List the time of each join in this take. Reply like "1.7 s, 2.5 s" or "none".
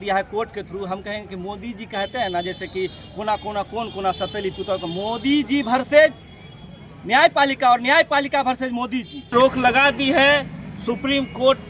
9.2 s